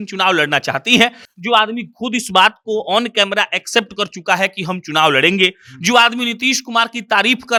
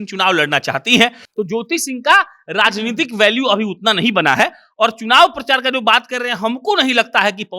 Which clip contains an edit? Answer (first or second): second